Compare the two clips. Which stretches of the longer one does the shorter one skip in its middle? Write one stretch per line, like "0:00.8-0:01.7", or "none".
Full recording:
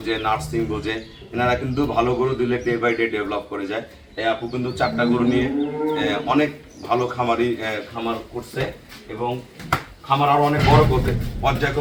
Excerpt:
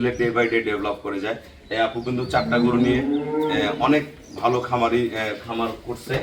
none